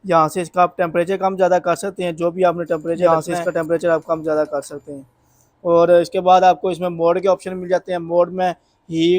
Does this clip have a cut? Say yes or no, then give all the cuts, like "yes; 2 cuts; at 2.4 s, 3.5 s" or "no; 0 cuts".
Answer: yes; 1 cut; at 3.0 s